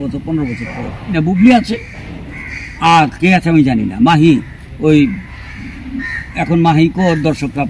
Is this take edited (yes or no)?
yes